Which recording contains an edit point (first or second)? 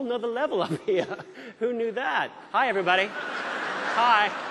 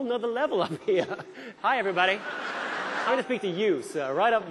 second